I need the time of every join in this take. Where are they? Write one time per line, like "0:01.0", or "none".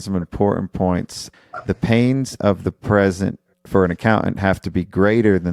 0:01.2